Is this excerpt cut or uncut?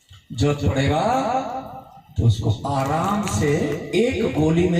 uncut